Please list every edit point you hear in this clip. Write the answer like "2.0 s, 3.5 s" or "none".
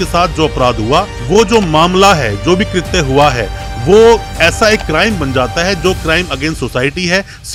none